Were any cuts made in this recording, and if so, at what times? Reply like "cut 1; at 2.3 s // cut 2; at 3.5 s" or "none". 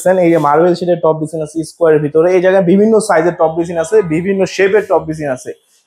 none